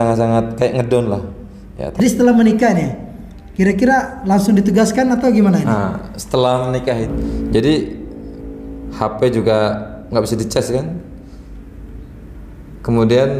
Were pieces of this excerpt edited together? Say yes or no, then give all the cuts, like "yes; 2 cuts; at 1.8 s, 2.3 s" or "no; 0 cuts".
yes; 2 cuts; at 2.0 s, 7.1 s